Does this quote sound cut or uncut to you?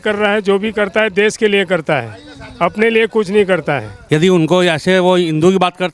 cut